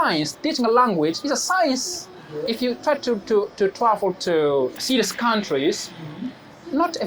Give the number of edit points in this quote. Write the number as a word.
two